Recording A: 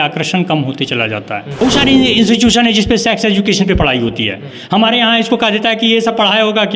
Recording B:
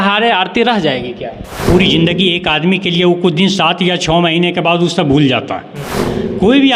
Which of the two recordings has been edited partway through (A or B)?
A